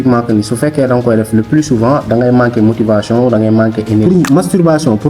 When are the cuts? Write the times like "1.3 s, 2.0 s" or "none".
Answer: 4.2 s